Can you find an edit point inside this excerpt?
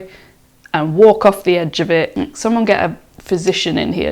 yes; 1 cut; at 2.2 s

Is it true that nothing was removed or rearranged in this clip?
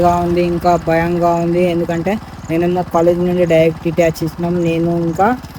yes; 0 cuts

